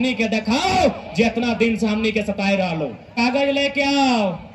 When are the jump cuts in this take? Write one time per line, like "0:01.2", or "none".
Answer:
0:03.1

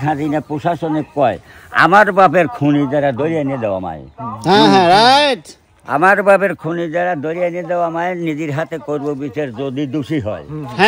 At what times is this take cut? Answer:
none

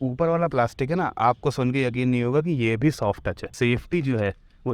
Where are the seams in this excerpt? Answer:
0:03.5

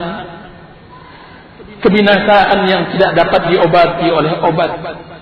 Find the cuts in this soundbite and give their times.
none

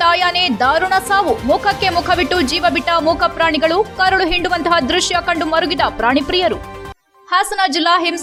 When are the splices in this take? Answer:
none

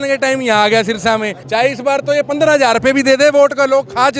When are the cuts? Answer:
0:01.4

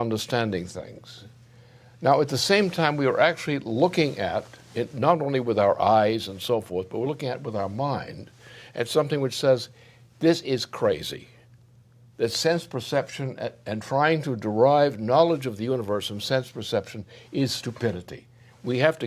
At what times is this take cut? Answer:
0:10.4

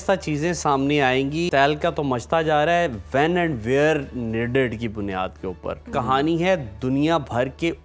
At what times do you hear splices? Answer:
0:01.4
0:05.8

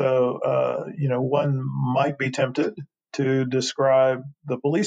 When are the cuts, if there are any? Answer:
none

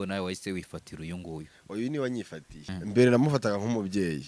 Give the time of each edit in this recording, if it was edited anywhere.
0:02.5

